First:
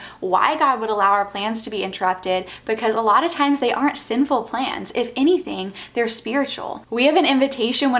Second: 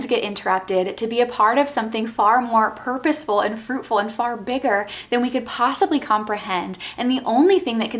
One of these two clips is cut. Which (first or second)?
first